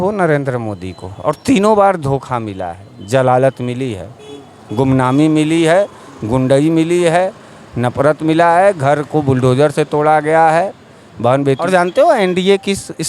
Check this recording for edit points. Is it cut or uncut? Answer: cut